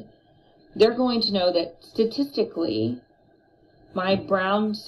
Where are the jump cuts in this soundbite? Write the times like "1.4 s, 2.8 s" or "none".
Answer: none